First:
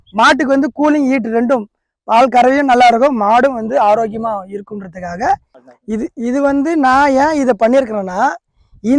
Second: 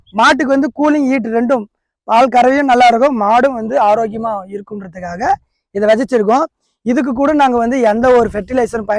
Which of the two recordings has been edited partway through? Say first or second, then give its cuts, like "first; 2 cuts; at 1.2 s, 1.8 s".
first; 1 cut; at 5.6 s